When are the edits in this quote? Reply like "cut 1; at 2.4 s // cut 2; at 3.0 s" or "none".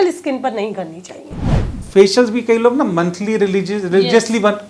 cut 1; at 1.7 s